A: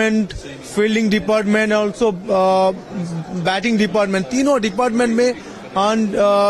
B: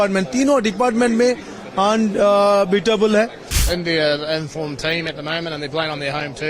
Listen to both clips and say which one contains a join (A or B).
B